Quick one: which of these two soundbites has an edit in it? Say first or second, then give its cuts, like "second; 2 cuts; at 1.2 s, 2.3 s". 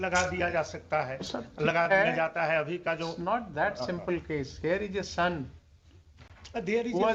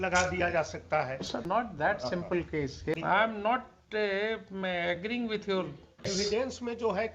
second; 3 cuts; at 1.4 s, 2.9 s, 6.1 s